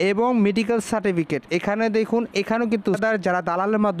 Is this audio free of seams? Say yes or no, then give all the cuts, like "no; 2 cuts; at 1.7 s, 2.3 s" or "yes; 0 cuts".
no; 1 cut; at 3.0 s